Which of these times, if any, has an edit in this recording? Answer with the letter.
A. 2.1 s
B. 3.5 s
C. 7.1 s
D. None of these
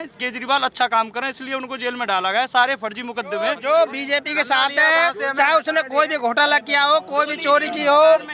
B